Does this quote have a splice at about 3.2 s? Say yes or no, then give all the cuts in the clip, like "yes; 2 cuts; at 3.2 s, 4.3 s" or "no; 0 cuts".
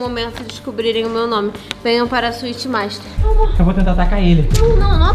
yes; 1 cut; at 3.2 s